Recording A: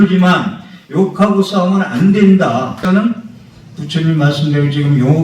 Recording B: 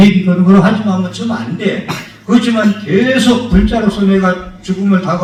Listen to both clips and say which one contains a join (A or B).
A